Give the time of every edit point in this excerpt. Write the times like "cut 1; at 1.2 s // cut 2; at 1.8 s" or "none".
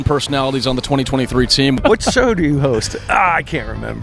cut 1; at 1.8 s